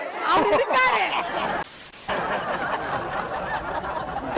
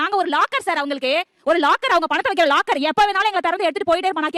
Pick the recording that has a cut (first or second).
first